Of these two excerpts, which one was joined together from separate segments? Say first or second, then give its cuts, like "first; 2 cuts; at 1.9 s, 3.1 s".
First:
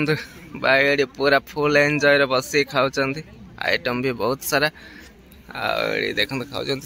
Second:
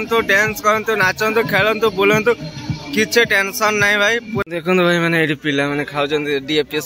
second; 1 cut; at 4.4 s